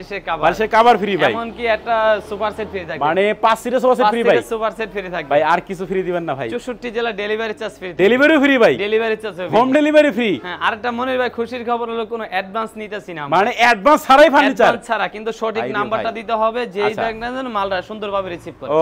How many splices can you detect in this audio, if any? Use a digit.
0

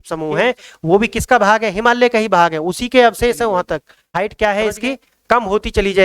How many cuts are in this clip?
1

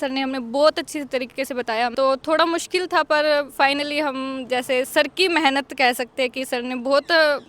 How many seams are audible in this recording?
1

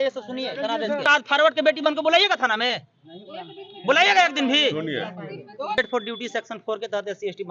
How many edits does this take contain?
2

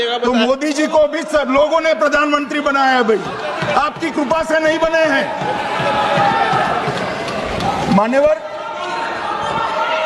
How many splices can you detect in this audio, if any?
0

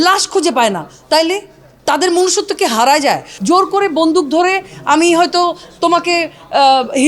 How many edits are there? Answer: 1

